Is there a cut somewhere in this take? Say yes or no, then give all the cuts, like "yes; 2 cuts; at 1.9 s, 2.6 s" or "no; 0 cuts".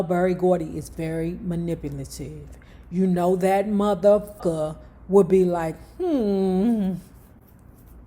yes; 1 cut; at 4.4 s